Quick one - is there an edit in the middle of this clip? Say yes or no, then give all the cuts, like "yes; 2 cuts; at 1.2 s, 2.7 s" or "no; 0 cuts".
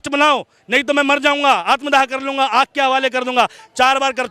no; 0 cuts